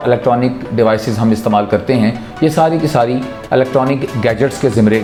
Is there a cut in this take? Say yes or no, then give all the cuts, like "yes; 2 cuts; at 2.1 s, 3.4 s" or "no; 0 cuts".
no; 0 cuts